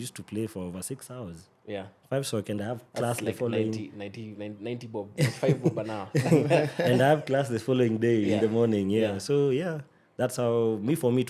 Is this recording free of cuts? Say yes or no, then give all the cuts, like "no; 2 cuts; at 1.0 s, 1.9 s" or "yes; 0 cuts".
yes; 0 cuts